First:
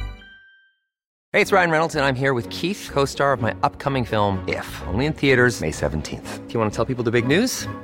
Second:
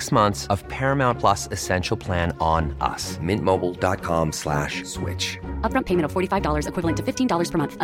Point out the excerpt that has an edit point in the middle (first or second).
first